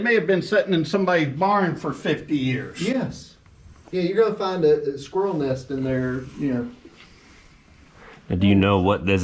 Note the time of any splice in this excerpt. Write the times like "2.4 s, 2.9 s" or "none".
none